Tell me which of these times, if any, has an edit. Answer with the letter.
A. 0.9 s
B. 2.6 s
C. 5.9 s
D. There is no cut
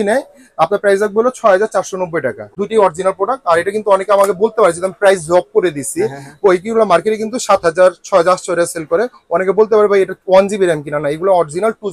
B